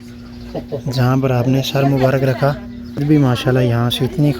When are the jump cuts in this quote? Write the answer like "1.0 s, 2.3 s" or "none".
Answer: 3.0 s